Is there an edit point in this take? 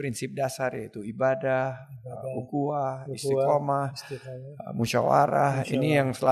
no; 0 cuts

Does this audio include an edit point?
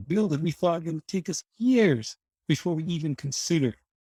no; 0 cuts

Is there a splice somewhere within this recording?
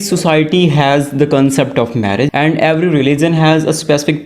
yes; 1 cut; at 2.3 s

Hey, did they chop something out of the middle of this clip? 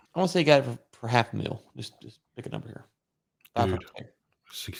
no; 0 cuts

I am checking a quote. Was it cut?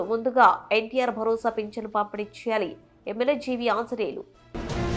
no; 0 cuts

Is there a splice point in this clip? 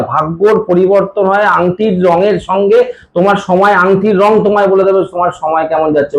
no; 0 cuts

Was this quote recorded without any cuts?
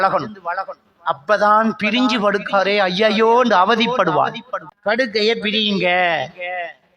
no; 1 cut; at 4.6 s

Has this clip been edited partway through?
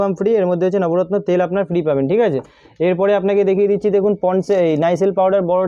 no; 0 cuts

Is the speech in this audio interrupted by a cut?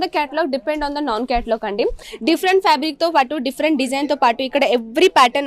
yes; 1 cut; at 2.0 s

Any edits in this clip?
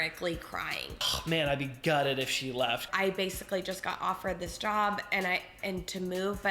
yes; 2 cuts; at 0.9 s, 2.9 s

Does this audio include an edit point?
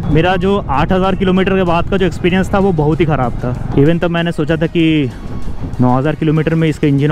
no; 0 cuts

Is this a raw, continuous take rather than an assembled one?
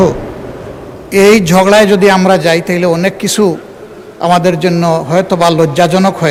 yes; 0 cuts

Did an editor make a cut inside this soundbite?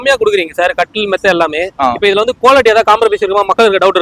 no; 0 cuts

